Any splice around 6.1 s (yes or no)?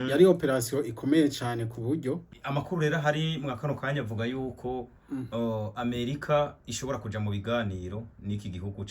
no